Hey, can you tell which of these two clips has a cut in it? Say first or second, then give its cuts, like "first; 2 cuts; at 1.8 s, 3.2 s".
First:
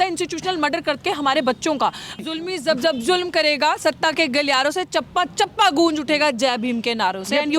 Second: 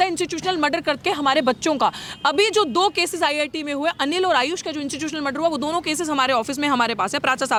first; 1 cut; at 2.2 s